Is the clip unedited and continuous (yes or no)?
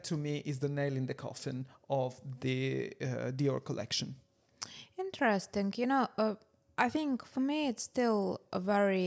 yes